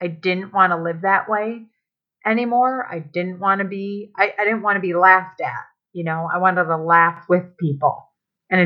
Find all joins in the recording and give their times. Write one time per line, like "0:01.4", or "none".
none